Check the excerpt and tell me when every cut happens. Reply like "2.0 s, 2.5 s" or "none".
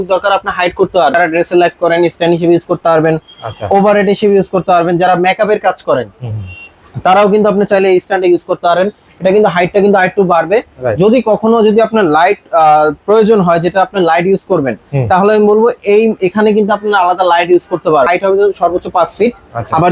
1.1 s, 18.1 s